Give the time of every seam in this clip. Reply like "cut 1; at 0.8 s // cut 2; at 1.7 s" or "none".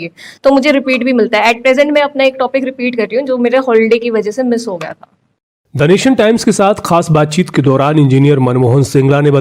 none